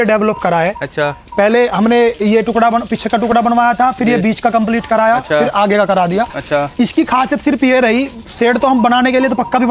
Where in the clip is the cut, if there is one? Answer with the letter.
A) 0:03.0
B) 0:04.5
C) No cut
C